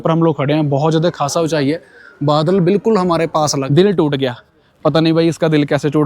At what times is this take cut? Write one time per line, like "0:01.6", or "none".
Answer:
0:03.6